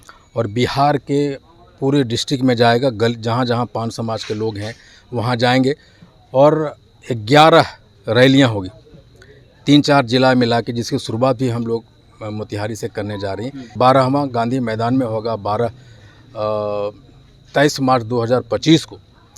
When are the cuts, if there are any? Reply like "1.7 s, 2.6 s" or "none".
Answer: 13.7 s

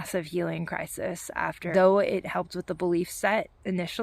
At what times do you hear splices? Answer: 1.7 s

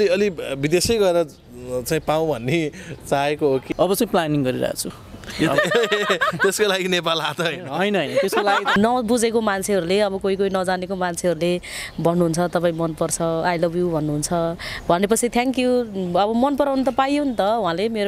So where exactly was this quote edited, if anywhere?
3.6 s, 8.8 s

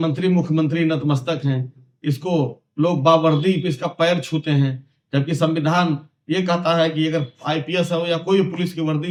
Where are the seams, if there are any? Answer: none

